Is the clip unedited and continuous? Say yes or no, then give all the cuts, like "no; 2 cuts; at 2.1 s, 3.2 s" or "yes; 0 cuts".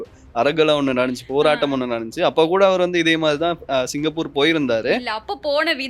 yes; 0 cuts